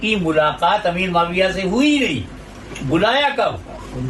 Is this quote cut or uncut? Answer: uncut